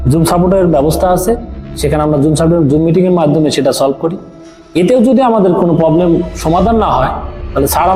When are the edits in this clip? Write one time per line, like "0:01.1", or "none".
none